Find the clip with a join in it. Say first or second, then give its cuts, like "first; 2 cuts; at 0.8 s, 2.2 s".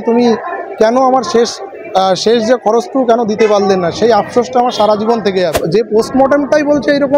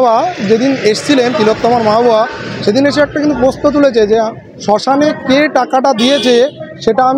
first; 1 cut; at 5.6 s